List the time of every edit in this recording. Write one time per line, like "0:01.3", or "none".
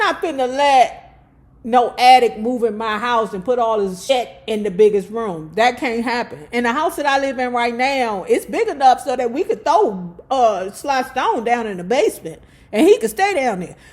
0:04.0